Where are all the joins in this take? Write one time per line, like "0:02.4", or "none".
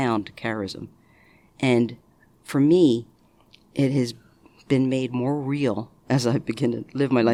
none